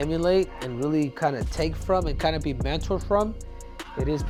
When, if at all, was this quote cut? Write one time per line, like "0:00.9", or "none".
none